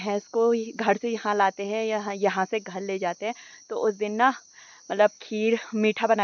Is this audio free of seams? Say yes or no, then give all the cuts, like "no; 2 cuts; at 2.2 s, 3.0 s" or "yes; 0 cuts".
yes; 0 cuts